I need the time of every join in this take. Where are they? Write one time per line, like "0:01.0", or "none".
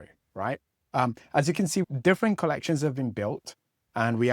0:01.9